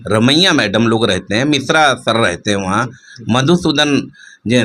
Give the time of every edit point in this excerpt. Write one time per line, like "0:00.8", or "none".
none